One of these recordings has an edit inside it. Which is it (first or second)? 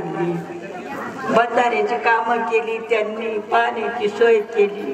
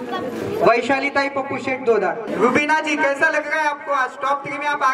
second